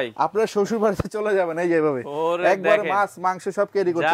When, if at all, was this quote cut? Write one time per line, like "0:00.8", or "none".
none